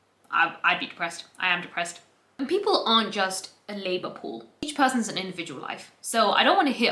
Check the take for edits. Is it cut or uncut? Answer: uncut